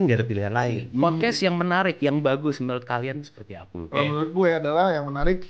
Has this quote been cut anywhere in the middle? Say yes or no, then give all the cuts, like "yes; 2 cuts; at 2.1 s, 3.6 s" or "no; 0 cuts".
yes; 2 cuts; at 1.0 s, 3.9 s